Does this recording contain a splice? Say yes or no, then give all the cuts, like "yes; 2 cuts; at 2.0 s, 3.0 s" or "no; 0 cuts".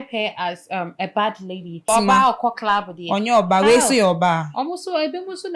yes; 1 cut; at 1.8 s